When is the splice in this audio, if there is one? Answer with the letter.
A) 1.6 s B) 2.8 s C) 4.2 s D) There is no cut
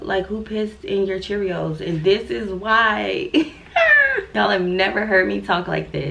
C